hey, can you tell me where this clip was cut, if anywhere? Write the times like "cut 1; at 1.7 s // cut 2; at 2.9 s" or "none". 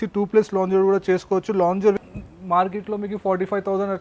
cut 1; at 2.4 s